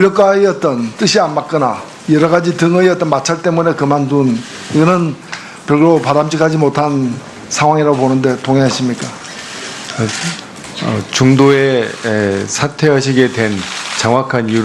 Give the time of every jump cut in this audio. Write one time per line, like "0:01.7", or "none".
none